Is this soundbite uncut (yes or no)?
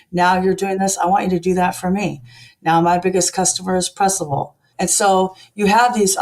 no